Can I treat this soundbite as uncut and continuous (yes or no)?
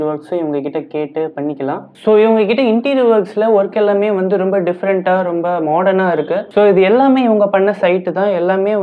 yes